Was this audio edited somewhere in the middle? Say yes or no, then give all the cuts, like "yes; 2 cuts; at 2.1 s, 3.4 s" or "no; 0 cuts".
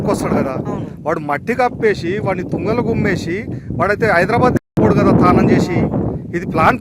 no; 0 cuts